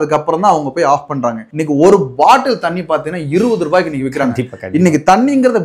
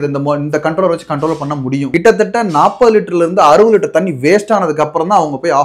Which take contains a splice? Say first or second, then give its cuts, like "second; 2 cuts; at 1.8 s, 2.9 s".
second; 1 cut; at 1.9 s